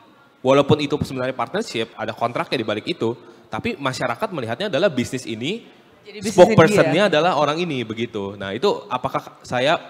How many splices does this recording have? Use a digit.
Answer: 1